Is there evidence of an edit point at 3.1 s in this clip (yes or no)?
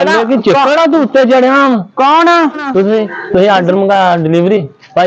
yes